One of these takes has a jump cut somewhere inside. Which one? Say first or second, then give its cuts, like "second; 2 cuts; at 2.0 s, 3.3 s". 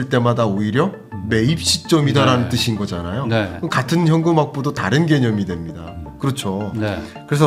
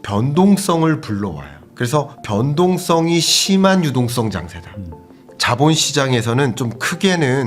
second; 1 cut; at 5.2 s